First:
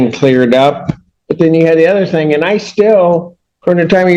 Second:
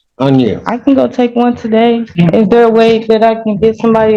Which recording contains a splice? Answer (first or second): second